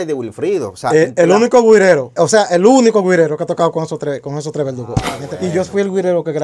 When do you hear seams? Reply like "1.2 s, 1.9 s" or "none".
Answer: 2.1 s, 5.4 s